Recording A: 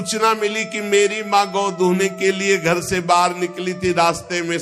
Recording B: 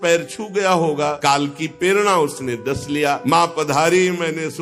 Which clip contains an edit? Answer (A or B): B